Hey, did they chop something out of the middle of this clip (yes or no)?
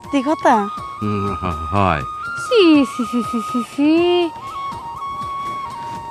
no